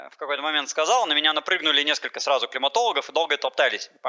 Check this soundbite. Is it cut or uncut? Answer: uncut